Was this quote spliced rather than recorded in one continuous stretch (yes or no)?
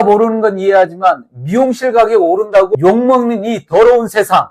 no